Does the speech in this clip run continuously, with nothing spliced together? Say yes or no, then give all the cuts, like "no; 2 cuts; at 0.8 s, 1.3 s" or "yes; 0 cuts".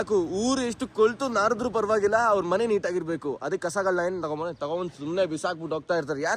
yes; 0 cuts